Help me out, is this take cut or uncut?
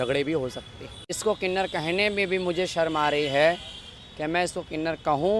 cut